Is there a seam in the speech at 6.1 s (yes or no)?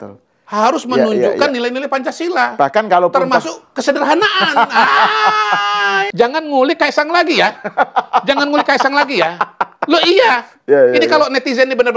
yes